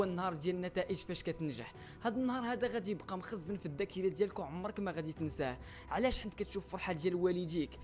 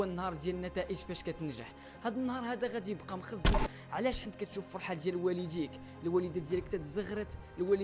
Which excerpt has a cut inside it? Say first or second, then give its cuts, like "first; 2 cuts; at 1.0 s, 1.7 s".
second; 1 cut; at 3.7 s